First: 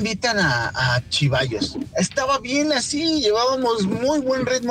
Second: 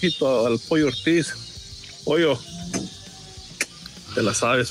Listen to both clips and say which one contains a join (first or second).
first